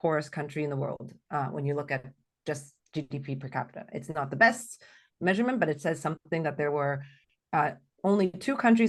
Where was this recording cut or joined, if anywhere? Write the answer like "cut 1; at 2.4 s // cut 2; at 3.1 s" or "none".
none